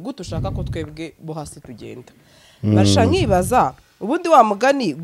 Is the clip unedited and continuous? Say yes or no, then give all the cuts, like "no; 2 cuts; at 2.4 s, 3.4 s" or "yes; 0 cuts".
yes; 0 cuts